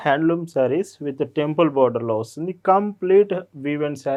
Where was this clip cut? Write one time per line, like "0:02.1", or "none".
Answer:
none